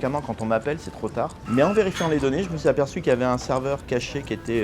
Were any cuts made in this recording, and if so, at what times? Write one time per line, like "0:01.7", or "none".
0:01.4